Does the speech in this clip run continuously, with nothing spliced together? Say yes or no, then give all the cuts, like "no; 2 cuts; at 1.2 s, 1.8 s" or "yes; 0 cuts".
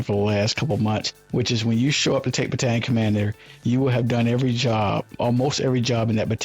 no; 1 cut; at 1.2 s